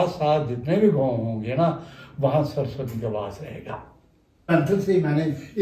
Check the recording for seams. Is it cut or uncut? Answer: cut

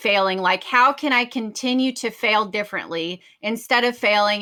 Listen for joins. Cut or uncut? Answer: uncut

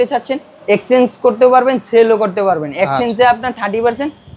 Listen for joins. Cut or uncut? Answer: uncut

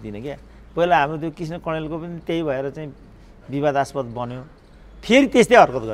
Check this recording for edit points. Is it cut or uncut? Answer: uncut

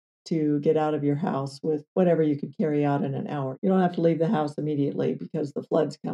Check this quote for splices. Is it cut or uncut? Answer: cut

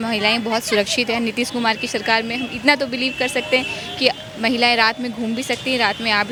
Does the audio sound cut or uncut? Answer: uncut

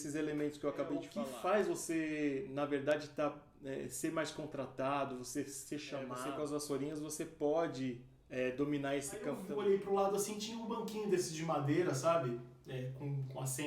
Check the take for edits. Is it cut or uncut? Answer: cut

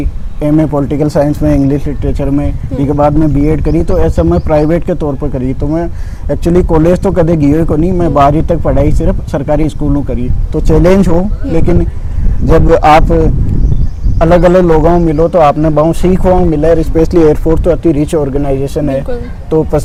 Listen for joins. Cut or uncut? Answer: uncut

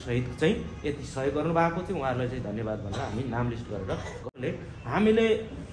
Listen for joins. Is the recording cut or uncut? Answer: cut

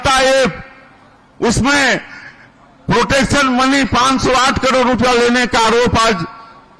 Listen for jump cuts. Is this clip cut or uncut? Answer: uncut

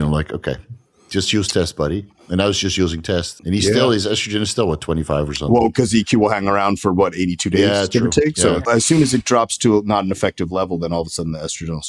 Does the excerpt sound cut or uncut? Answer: cut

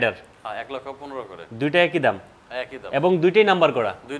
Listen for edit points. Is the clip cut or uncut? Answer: uncut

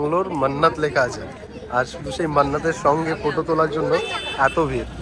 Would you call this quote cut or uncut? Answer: uncut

